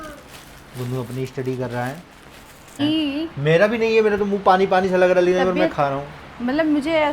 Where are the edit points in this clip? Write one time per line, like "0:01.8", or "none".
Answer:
0:02.8